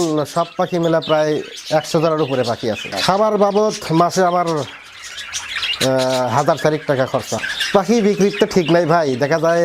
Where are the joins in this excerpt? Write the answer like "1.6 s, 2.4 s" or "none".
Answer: 2.9 s, 7.4 s